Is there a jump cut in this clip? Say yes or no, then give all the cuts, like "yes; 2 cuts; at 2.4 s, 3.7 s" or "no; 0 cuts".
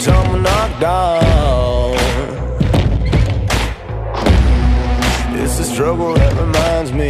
no; 0 cuts